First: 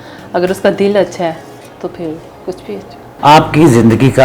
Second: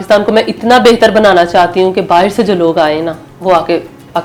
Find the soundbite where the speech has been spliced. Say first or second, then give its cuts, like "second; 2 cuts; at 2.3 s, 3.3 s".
first; 1 cut; at 3.1 s